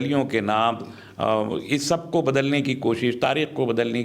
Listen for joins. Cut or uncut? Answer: uncut